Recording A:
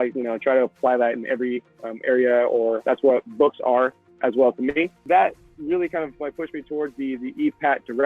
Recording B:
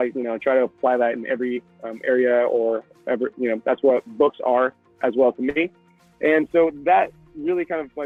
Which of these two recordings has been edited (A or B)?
A